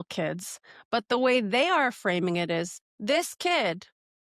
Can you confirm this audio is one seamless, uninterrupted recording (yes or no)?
no